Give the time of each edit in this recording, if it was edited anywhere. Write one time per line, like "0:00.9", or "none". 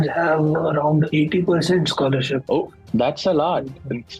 0:01.1
0:02.4